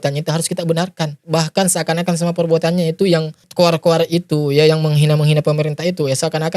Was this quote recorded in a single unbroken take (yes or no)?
no